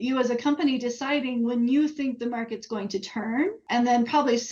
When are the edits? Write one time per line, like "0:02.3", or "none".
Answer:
0:03.6